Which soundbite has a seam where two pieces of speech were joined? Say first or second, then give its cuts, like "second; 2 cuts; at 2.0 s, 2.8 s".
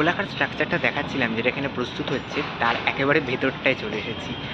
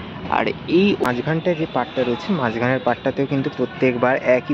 second; 1 cut; at 1.0 s